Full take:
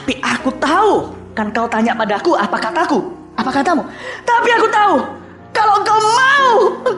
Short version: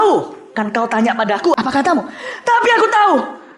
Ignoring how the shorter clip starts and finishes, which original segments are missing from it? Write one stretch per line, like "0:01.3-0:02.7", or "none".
0:02.4-0:03.4